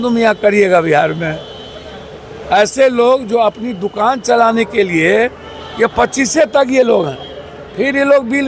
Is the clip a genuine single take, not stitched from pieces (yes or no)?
yes